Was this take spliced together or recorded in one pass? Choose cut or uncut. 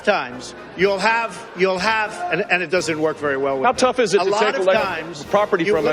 uncut